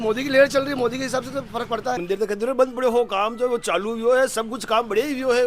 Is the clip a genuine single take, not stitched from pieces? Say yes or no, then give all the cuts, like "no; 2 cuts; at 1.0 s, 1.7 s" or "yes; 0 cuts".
no; 1 cut; at 2.0 s